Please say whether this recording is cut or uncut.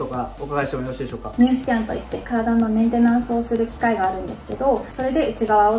cut